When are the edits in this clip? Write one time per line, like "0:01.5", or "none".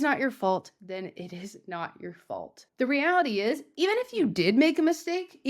0:02.7